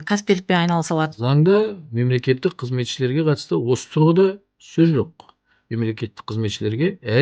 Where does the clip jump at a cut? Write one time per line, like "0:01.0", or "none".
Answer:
0:01.1